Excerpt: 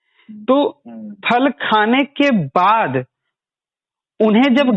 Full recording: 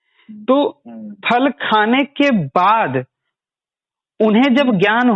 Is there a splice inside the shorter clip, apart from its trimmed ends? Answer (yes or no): no